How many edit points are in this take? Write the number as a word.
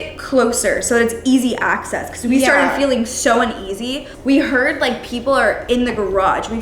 one